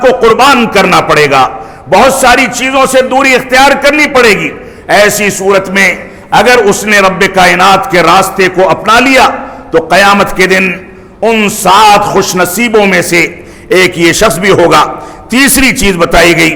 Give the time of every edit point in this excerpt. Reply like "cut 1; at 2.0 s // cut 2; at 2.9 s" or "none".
none

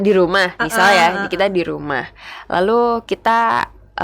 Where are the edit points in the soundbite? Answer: none

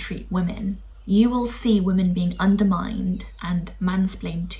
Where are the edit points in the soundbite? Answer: cut 1; at 0.9 s

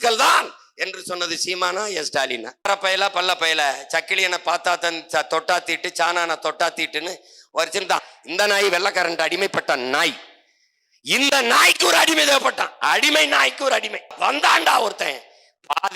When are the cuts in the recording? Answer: cut 1; at 2.7 s // cut 2; at 8.2 s // cut 3; at 14.1 s

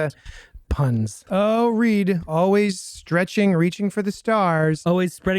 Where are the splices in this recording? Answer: cut 1; at 1.2 s

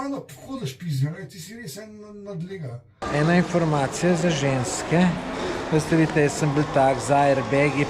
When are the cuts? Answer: cut 1; at 3.1 s

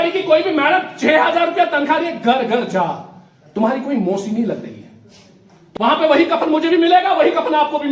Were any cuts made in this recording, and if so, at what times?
cut 1; at 5.5 s

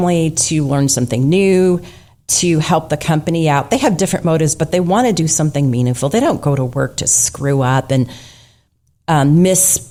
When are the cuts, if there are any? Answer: none

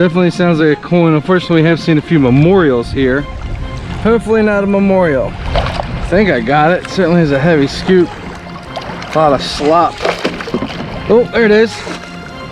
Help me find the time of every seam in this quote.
cut 1; at 5.4 s

